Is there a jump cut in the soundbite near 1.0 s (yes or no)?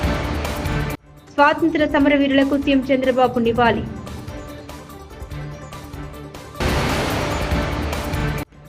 yes